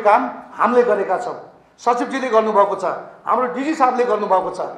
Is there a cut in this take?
no; 0 cuts

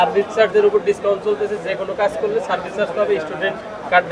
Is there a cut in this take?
no; 0 cuts

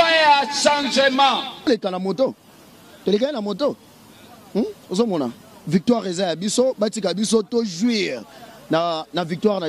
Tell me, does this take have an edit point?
yes; 1 cut; at 1.7 s

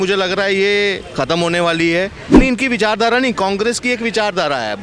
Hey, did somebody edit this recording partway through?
yes; 1 cut; at 2.3 s

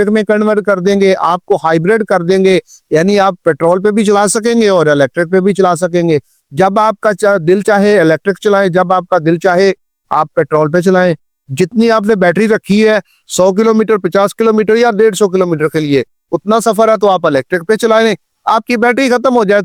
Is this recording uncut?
yes; 0 cuts

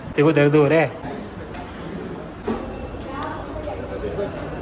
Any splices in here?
yes; 2 cuts; at 1.0 s, 2.4 s

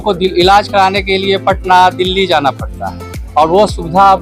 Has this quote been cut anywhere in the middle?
no; 0 cuts

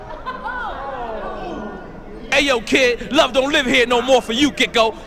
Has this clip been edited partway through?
yes; 1 cut; at 2.2 s

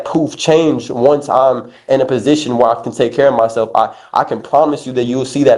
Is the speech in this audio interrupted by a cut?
no; 0 cuts

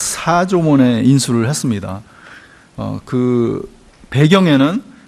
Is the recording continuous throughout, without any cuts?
yes; 0 cuts

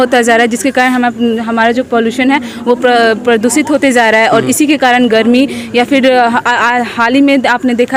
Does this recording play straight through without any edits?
yes; 0 cuts

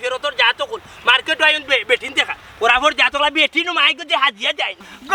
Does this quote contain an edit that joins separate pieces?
no; 0 cuts

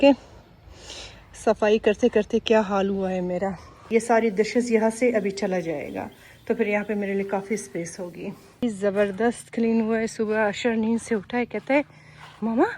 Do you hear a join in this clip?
yes; 2 cuts; at 3.7 s, 8.6 s

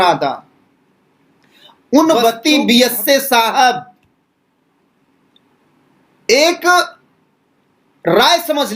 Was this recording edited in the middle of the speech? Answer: yes; 1 cut; at 2.4 s

